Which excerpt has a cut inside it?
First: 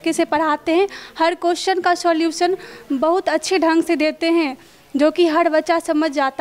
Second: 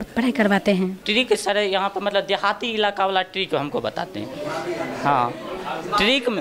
second; 1 cut; at 1.0 s

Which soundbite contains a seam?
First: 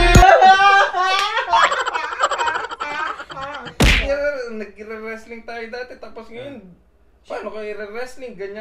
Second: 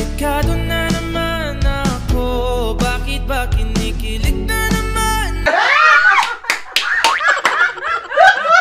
first; 1 cut; at 4.0 s

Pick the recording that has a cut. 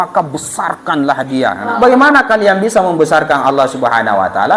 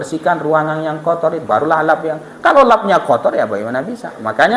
first; 1 cut; at 1.7 s

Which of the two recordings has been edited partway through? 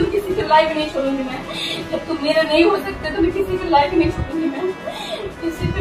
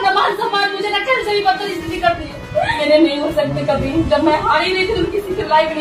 second; 1 cut; at 2.8 s

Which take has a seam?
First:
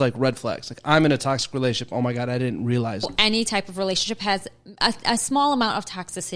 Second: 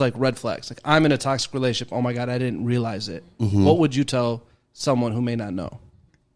first; 1 cut; at 3.1 s

